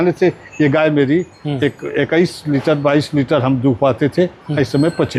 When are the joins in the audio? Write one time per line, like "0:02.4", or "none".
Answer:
none